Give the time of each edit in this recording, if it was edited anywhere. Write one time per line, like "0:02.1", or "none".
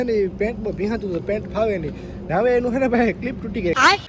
none